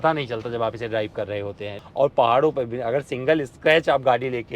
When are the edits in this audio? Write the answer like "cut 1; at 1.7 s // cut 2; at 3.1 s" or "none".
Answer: cut 1; at 1.7 s